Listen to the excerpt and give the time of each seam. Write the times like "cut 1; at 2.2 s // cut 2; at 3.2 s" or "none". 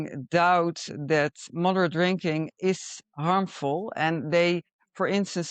cut 1; at 1.5 s